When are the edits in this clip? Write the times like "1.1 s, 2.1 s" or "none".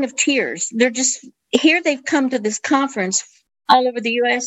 3.3 s